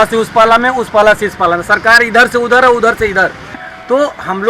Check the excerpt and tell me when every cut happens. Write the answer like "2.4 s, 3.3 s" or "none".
3.6 s